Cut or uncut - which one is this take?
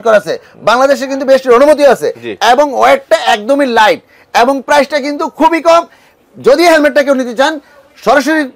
uncut